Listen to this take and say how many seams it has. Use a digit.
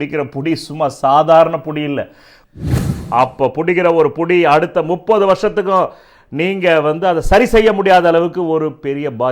1